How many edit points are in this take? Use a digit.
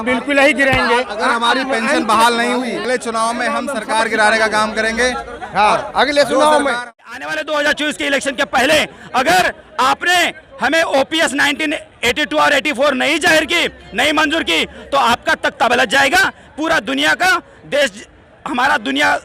1